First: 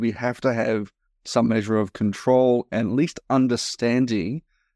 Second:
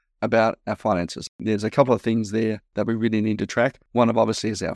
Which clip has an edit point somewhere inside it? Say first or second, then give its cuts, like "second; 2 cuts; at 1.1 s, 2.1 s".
second; 3 cuts; at 1.4 s, 2.6 s, 3.8 s